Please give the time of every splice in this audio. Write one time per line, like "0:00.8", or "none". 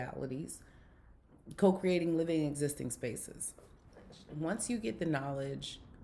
0:04.2